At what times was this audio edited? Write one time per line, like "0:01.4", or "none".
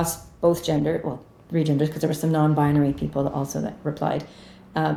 none